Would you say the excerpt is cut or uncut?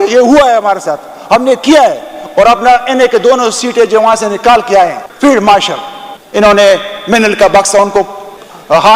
cut